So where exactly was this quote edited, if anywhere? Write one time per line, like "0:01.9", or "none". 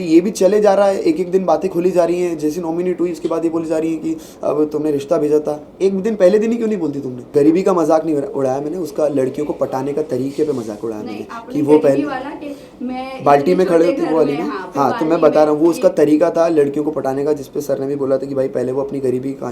0:07.1